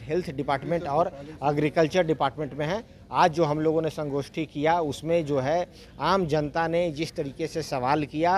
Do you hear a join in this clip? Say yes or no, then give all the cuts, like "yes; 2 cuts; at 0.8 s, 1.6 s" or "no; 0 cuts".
no; 0 cuts